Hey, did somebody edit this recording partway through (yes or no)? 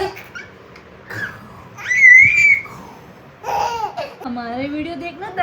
yes